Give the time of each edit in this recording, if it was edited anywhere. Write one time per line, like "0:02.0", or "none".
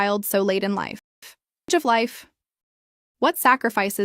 0:01.7